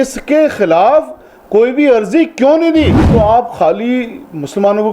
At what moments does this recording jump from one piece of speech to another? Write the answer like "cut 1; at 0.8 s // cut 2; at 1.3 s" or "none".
cut 1; at 3.0 s